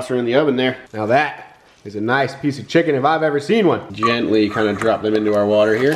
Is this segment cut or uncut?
cut